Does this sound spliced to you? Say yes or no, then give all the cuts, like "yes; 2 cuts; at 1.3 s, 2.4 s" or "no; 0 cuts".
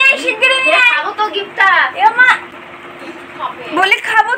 no; 0 cuts